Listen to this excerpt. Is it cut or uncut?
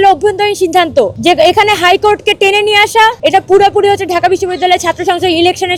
uncut